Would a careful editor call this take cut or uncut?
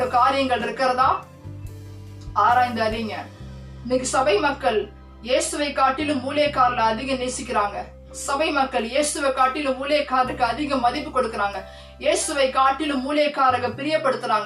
uncut